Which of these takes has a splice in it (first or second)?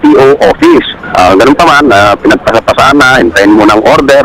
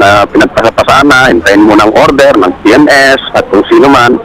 first